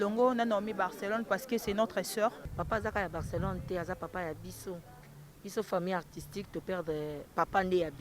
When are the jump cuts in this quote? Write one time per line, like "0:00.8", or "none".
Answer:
0:02.4